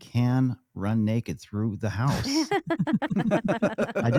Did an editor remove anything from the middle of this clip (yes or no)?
no